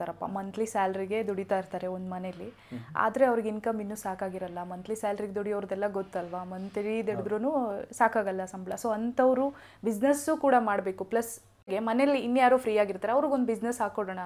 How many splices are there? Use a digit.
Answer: 1